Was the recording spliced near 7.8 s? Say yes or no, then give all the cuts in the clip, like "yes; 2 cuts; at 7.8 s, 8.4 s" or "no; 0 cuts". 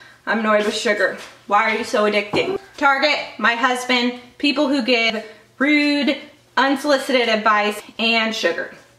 yes; 3 cuts; at 2.5 s, 5.1 s, 7.8 s